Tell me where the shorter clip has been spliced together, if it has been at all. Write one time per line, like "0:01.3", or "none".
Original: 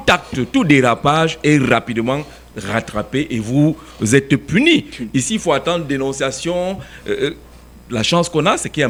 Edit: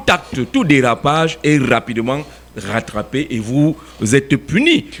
none